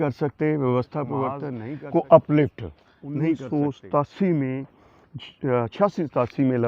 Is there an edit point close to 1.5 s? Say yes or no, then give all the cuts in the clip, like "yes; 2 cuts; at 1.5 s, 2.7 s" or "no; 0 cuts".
yes; 2 cuts; at 1.5 s, 3.4 s